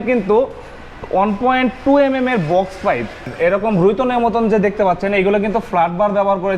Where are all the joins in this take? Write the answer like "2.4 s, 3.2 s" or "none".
3.3 s